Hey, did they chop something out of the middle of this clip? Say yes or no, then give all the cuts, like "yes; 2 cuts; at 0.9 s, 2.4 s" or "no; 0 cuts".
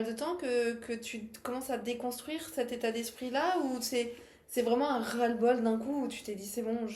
no; 0 cuts